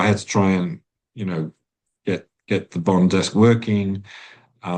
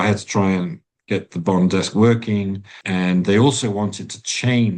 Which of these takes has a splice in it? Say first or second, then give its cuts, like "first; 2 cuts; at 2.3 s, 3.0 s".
second; 2 cuts; at 0.9 s, 2.7 s